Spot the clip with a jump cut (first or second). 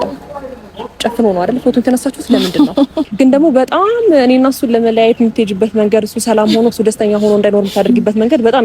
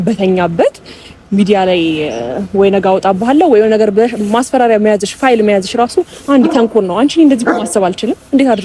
first